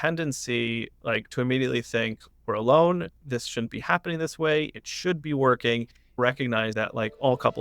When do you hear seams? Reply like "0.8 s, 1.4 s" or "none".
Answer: 6.3 s